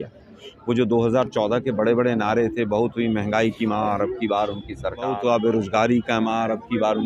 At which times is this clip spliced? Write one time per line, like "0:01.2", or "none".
0:05.1